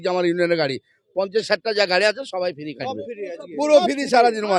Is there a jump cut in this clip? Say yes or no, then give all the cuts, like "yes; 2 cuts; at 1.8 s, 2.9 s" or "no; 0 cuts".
no; 0 cuts